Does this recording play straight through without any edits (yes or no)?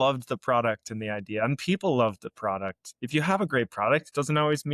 yes